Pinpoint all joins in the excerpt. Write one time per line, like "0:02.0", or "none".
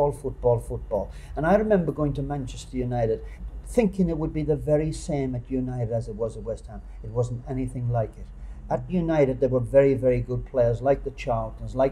0:03.4